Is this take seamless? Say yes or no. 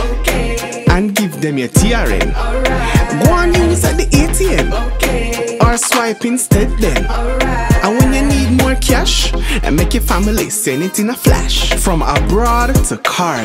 yes